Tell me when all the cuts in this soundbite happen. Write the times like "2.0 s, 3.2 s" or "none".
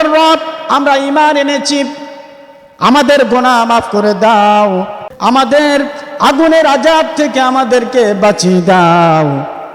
5.0 s